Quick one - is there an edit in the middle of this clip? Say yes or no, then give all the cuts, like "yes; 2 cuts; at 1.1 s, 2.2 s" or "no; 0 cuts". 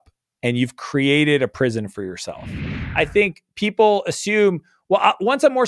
yes; 1 cut; at 2.7 s